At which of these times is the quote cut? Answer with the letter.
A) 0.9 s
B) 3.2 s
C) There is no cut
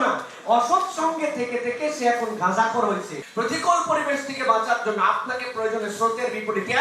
B